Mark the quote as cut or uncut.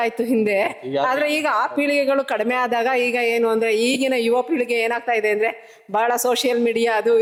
uncut